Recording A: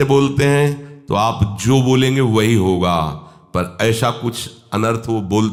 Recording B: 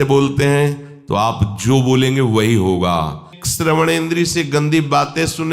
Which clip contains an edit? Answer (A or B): B